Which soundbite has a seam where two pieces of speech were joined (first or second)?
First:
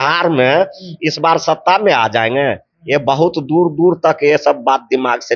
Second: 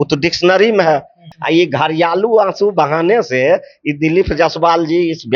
second